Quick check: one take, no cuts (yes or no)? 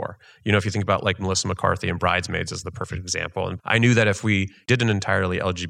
no